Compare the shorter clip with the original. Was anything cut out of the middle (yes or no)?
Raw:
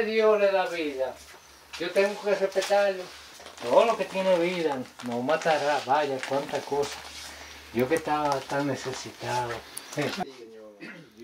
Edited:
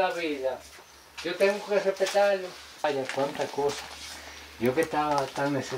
yes